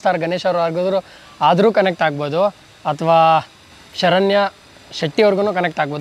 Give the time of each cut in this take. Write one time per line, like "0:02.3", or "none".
0:03.6